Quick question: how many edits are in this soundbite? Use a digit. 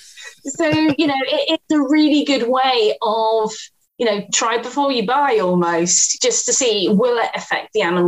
1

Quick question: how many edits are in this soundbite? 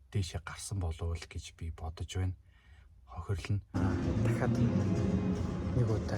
1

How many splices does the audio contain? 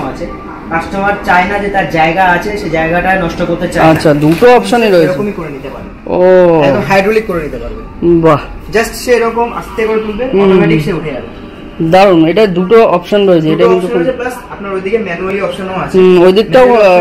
0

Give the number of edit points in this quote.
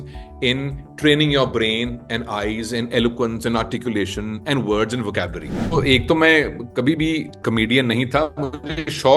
1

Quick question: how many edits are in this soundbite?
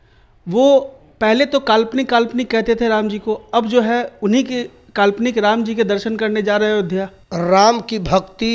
1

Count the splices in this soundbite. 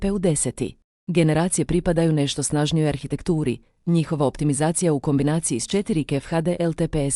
1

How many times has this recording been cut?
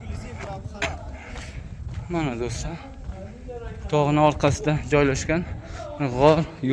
0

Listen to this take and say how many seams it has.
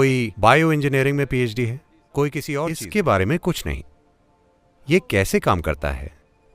1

